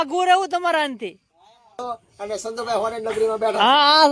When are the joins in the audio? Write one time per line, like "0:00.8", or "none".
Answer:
0:01.8